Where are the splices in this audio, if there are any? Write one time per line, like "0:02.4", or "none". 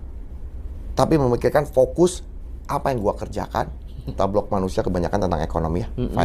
0:04.1

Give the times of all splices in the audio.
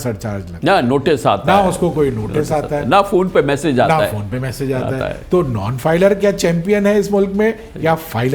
none

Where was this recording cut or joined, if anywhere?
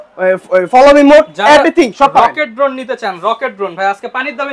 none

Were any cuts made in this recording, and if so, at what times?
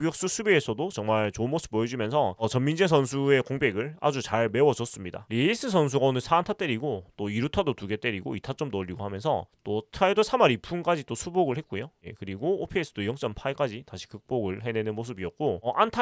0:05.3

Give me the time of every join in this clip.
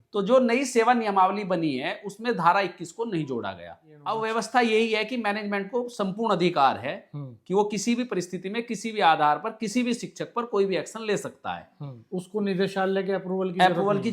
0:04.0

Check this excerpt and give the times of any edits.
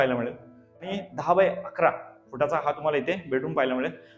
0:01.0

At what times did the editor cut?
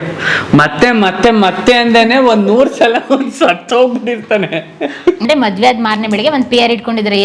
0:05.2

